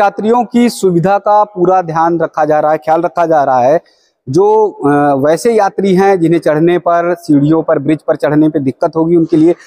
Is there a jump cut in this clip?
no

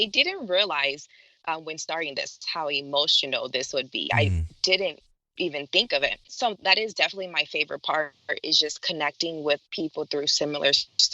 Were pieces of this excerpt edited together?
yes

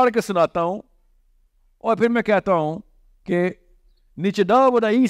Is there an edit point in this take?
no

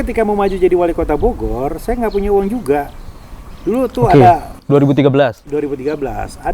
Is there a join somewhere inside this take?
no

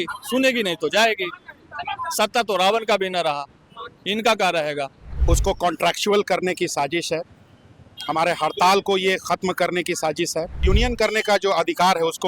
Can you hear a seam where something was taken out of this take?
yes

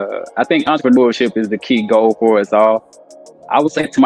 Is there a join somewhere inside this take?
no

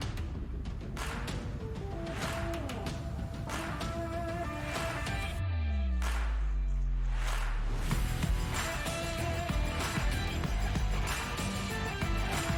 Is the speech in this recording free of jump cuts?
yes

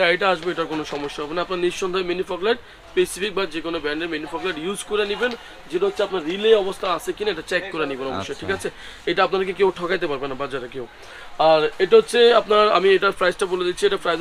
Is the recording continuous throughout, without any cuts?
yes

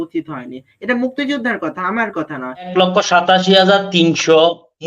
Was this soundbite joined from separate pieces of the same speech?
yes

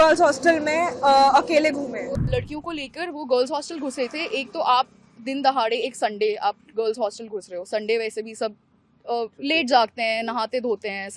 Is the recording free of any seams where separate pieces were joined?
no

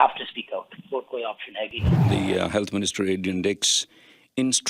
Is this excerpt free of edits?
no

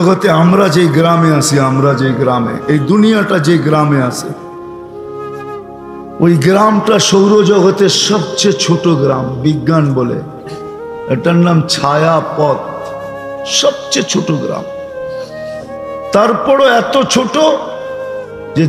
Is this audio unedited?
yes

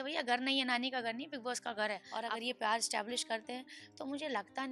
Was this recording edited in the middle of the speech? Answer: yes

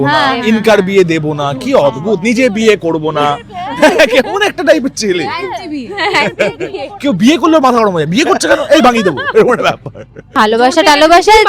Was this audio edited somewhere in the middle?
yes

